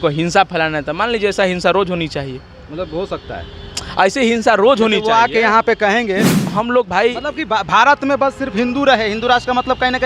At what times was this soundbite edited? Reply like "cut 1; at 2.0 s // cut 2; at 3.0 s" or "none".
cut 1; at 6.4 s

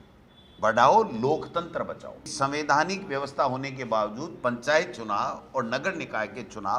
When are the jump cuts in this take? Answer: cut 1; at 2.3 s

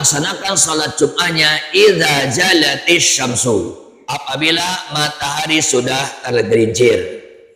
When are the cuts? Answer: none

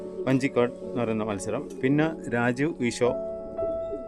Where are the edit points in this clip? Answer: cut 1; at 3.1 s

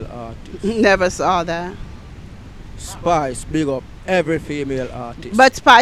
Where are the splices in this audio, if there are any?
none

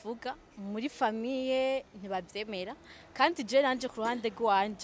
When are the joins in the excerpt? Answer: none

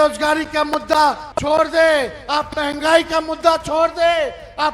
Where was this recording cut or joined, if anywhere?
cut 1; at 1.3 s

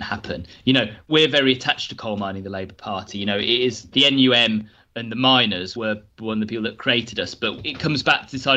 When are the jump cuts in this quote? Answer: cut 1; at 1.1 s // cut 2; at 3.9 s

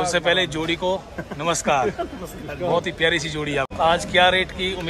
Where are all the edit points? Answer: cut 1; at 3.7 s

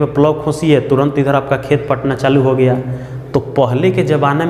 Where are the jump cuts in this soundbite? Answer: none

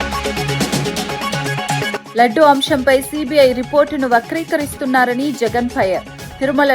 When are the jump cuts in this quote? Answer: cut 1; at 2.1 s

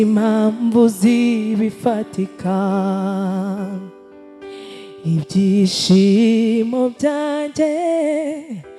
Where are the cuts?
none

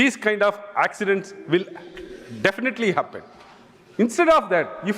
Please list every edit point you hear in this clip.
none

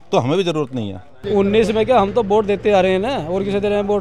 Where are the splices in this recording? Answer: cut 1; at 1.1 s

